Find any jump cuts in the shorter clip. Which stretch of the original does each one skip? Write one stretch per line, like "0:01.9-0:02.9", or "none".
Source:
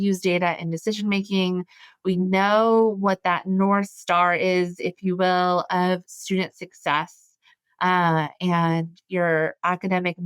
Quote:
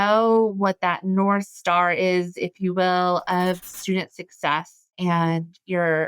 0:07.3-0:08.3